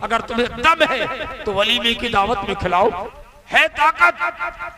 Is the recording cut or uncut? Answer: cut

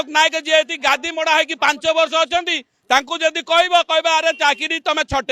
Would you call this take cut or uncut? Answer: uncut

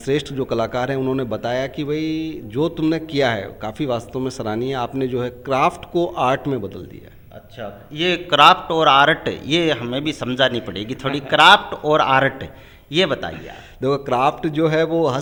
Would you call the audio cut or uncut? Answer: uncut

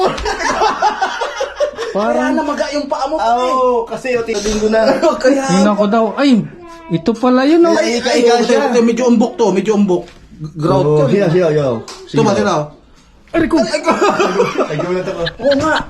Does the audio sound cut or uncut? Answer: cut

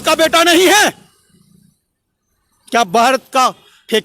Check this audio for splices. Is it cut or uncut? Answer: uncut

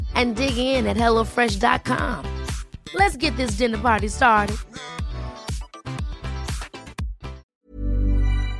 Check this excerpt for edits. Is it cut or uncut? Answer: cut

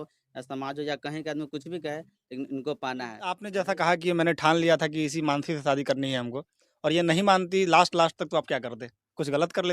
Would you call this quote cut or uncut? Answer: cut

